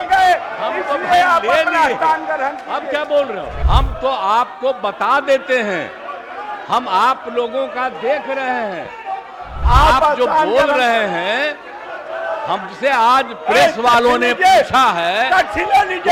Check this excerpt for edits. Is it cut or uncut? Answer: cut